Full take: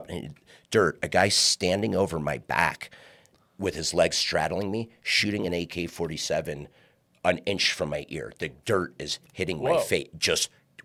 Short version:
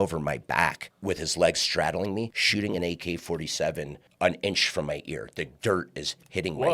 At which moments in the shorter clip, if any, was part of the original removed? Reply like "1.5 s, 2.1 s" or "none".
0.9 s, 2.4 s, 4.0 s